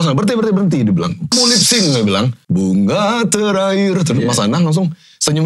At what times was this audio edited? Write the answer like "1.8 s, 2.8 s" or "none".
1.3 s, 2.4 s